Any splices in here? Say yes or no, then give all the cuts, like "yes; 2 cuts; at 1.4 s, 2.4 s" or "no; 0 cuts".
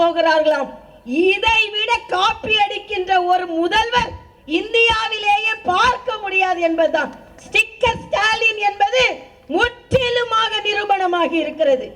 no; 0 cuts